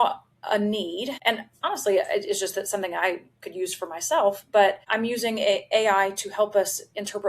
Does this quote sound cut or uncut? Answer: cut